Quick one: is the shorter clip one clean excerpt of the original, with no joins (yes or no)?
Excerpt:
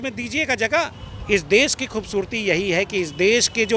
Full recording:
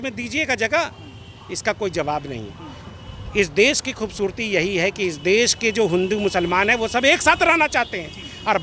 no